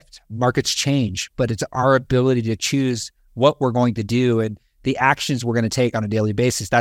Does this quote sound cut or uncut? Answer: uncut